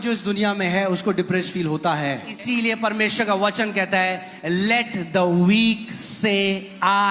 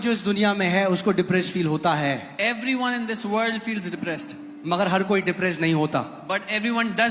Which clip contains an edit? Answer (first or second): first